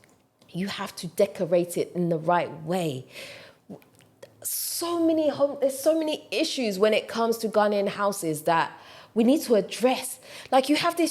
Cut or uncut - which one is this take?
uncut